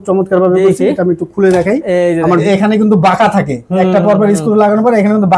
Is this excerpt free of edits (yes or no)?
no